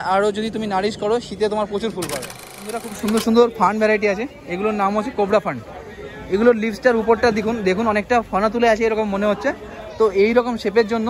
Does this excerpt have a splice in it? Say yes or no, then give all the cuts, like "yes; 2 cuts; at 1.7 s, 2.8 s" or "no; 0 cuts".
yes; 1 cut; at 2.8 s